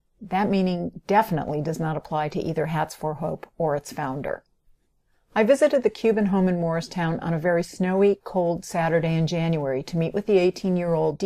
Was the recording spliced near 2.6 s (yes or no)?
yes